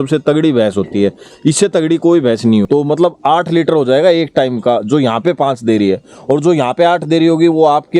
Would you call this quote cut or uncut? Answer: cut